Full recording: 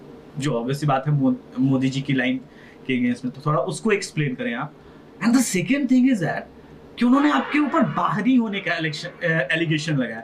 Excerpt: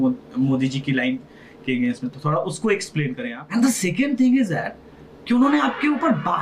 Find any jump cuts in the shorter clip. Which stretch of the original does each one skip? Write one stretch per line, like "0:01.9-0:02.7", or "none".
0:04.5-0:05.0